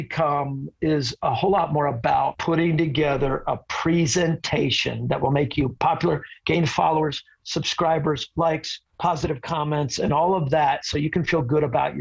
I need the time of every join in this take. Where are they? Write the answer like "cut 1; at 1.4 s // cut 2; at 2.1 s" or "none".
cut 1; at 1.1 s // cut 2; at 2.4 s